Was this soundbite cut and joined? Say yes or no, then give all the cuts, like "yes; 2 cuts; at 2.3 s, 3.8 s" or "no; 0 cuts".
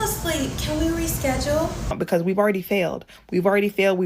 yes; 1 cut; at 1.9 s